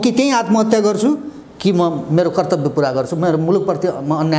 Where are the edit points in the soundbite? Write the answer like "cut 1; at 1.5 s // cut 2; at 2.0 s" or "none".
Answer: none